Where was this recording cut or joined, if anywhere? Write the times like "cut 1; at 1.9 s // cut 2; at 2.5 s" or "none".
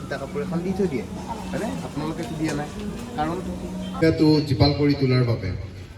cut 1; at 4.0 s